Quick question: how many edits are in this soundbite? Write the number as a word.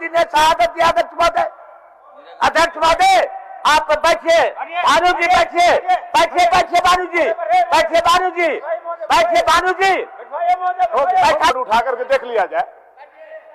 one